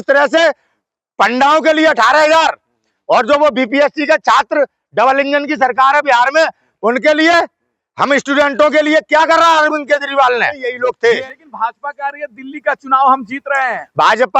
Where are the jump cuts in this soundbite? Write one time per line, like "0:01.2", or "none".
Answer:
0:10.7